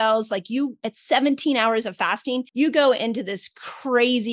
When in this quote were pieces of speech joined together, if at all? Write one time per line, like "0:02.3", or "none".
0:02.5